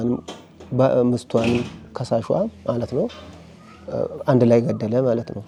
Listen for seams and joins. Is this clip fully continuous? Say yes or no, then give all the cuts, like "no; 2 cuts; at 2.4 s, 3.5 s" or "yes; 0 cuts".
yes; 0 cuts